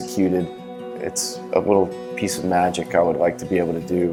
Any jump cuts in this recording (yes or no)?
no